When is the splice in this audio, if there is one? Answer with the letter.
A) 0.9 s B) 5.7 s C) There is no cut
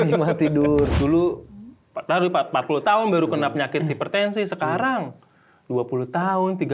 A